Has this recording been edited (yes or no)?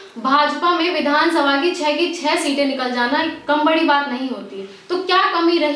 no